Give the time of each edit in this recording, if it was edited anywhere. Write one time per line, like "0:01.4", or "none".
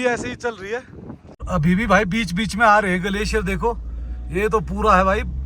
0:01.4